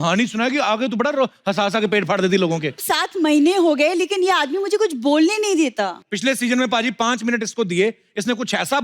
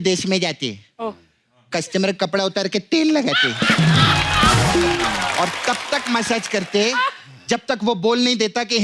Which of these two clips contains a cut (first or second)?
first